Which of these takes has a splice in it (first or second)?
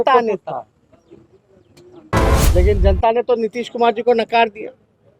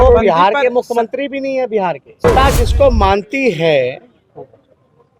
second